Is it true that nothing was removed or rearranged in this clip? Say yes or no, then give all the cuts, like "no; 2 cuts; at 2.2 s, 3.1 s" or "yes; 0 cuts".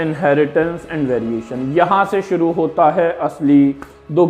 yes; 0 cuts